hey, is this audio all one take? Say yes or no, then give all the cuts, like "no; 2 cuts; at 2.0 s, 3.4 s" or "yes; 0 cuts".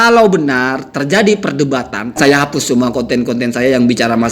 no; 1 cut; at 2.2 s